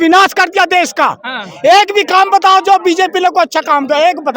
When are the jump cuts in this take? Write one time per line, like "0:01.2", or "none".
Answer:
none